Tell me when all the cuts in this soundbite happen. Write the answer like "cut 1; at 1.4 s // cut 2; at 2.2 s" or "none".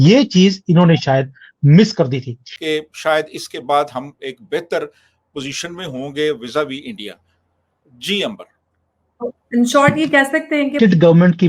cut 1; at 2.5 s // cut 2; at 10.7 s